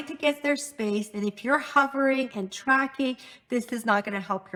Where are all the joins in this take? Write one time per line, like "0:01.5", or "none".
none

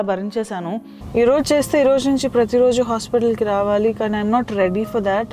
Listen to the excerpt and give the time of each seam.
0:01.0

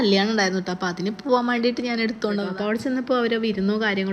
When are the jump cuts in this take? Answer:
0:02.5

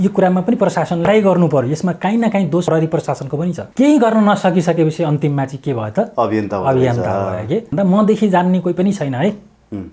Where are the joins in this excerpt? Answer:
0:01.1
0:02.6
0:03.6
0:07.7

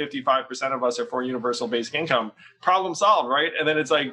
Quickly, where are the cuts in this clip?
none

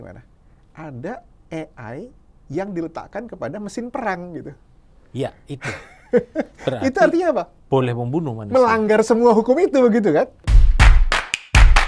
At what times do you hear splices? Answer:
0:10.4

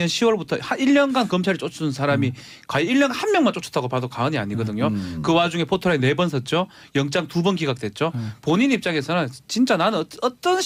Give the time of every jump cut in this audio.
none

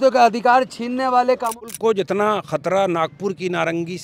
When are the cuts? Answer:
0:01.7

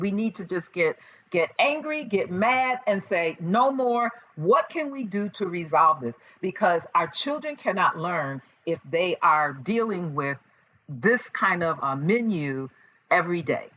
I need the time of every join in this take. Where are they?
0:11.8

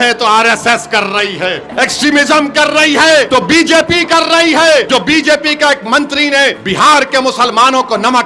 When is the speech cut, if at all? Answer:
0:01.6
0:03.3
0:04.9
0:06.6

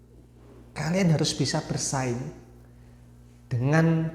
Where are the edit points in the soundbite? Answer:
none

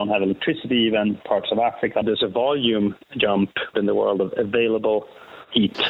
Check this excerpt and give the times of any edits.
0:02.0
0:03.7

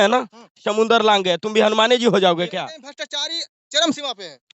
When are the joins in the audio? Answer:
0:02.6

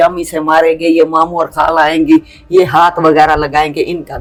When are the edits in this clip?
none

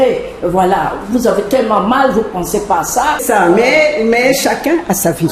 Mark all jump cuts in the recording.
0:03.2

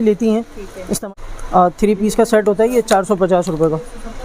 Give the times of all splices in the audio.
0:01.0

